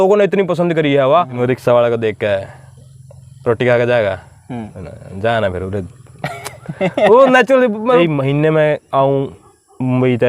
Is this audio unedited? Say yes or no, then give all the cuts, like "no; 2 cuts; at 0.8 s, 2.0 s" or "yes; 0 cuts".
no; 2 cuts; at 1.4 s, 8.0 s